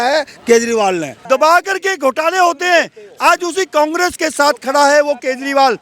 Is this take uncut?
no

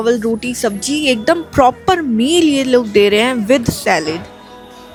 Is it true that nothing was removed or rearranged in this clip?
yes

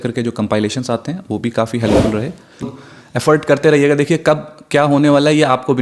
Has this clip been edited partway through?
yes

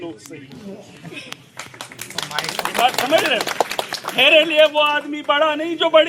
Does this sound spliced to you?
no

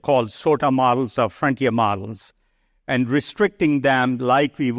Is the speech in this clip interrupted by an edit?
no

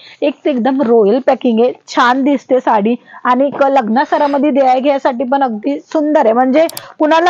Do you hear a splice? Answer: no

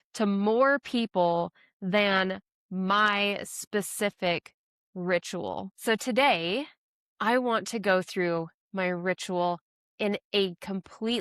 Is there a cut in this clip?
yes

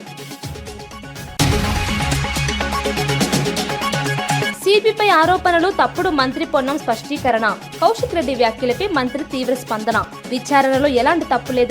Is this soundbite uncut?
no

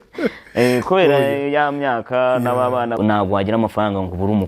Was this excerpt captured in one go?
no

